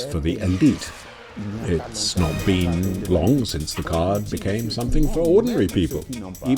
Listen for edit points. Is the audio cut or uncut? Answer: cut